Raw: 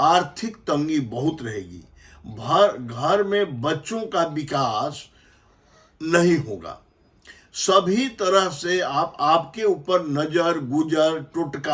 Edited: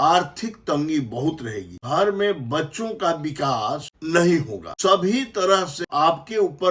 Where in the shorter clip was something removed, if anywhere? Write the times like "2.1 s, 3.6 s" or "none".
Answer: 1.8 s, 3.9 s, 4.6 s, 5.8 s